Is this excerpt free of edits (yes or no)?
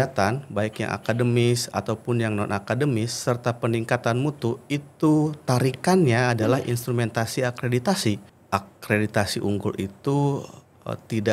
no